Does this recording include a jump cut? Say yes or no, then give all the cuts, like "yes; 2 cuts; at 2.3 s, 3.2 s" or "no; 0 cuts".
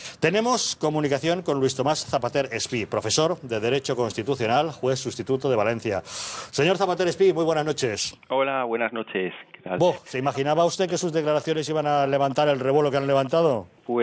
no; 0 cuts